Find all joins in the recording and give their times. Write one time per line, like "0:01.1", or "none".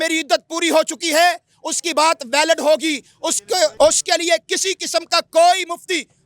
0:03.7